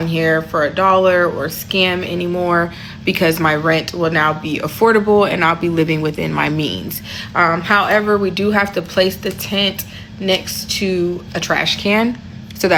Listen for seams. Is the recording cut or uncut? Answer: uncut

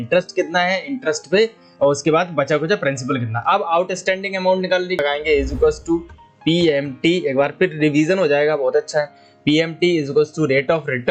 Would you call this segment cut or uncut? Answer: cut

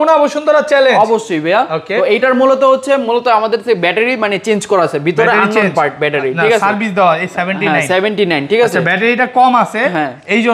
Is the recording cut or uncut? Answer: uncut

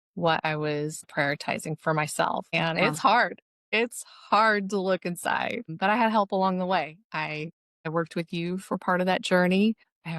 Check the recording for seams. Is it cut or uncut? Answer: cut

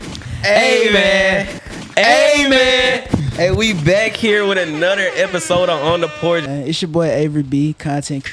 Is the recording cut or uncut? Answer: cut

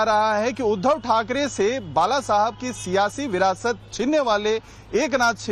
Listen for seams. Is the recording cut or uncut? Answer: cut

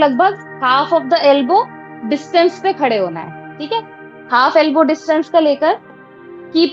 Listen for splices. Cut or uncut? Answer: uncut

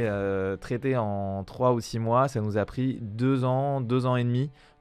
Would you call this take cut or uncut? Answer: uncut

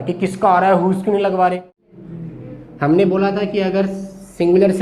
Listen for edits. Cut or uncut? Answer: cut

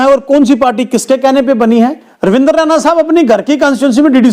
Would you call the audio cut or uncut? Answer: cut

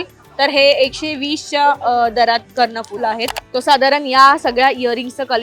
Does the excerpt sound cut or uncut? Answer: cut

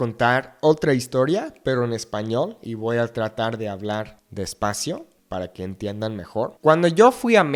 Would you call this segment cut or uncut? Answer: uncut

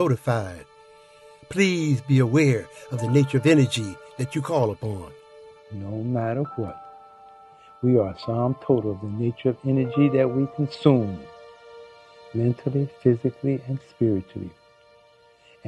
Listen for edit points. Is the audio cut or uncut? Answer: uncut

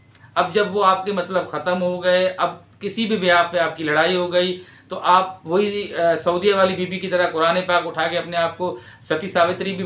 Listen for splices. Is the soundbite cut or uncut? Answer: uncut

